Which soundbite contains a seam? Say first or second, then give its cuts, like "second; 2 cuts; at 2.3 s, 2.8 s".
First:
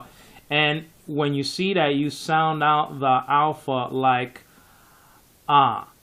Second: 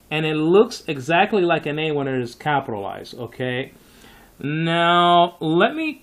second; 1 cut; at 2.0 s